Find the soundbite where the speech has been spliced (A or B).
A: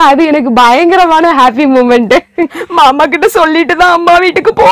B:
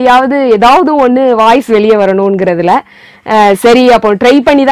A